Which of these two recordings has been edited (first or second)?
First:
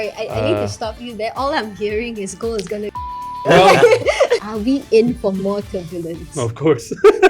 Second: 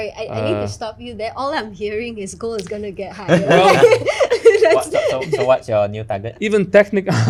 first